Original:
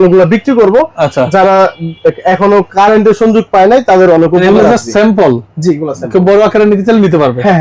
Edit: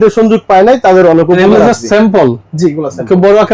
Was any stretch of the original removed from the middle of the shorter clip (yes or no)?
no